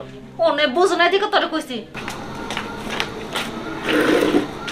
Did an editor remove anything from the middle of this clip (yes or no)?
yes